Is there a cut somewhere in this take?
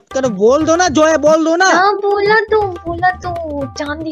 no; 0 cuts

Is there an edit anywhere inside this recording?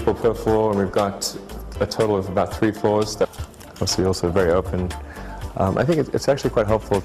no; 0 cuts

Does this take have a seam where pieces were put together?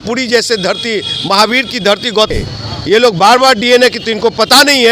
yes; 1 cut; at 2.3 s

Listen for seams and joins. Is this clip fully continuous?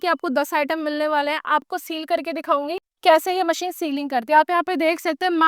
no; 2 cuts; at 1.7 s, 2.9 s

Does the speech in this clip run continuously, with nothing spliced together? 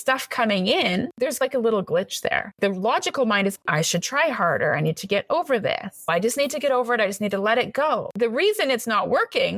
no; 4 cuts; at 1.1 s, 2.5 s, 3.7 s, 8.1 s

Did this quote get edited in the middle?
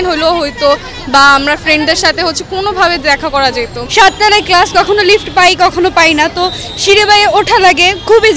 no; 0 cuts

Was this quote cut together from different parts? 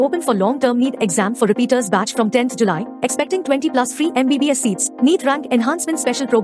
no; 0 cuts

